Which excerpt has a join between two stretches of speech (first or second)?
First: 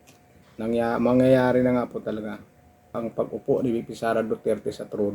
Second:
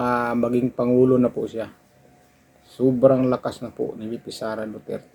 first